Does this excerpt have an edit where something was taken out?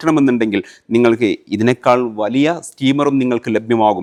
no; 0 cuts

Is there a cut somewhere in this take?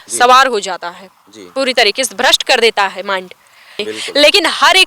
yes; 1 cut; at 3.8 s

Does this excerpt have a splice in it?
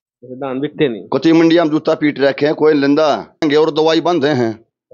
yes; 1 cut; at 3.4 s

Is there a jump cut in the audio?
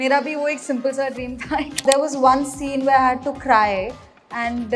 yes; 1 cut; at 1.8 s

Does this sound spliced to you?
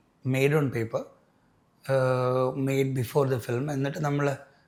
no; 0 cuts

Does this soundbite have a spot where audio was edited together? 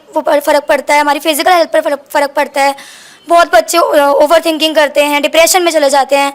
no; 0 cuts

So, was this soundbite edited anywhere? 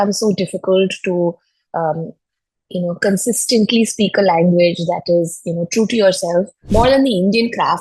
yes; 1 cut; at 6.6 s

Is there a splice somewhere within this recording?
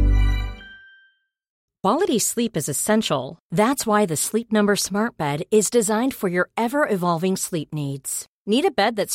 yes; 1 cut; at 1.7 s

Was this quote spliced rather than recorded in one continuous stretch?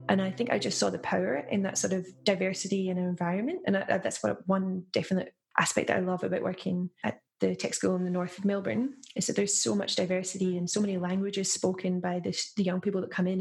no; 0 cuts

